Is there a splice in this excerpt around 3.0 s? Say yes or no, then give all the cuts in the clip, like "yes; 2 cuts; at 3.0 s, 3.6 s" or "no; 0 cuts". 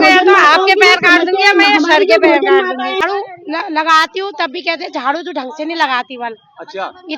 yes; 1 cut; at 3.0 s